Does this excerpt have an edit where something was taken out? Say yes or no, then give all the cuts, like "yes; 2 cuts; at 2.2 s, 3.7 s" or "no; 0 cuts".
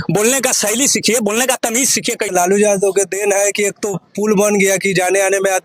yes; 1 cut; at 2.3 s